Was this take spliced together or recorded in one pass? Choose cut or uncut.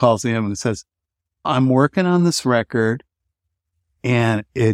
uncut